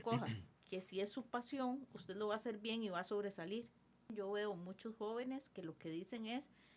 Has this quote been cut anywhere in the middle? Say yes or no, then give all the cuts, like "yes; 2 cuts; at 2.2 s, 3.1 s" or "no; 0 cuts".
yes; 1 cut; at 4.1 s